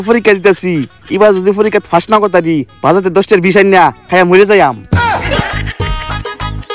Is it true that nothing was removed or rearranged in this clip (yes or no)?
yes